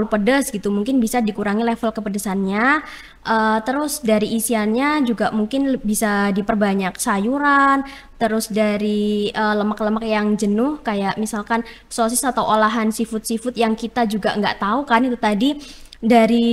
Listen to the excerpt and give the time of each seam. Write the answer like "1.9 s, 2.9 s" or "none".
none